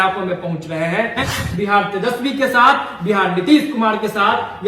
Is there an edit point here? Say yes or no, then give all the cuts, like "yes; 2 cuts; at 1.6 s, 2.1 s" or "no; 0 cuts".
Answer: yes; 1 cut; at 1.3 s